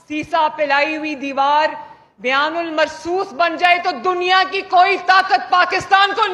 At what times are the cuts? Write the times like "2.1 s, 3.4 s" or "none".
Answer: none